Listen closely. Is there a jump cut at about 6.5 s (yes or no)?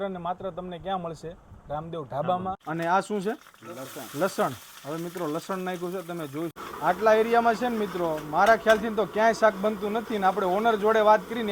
yes